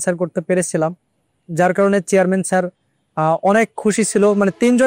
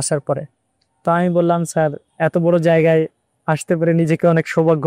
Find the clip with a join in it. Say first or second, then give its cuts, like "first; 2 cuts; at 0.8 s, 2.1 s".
second; 1 cut; at 2.1 s